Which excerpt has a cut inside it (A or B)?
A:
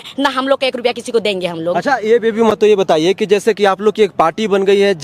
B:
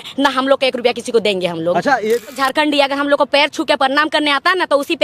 B